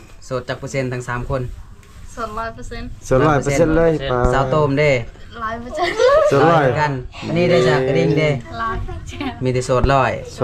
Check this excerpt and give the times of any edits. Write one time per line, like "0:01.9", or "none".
none